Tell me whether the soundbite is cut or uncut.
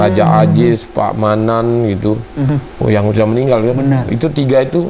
cut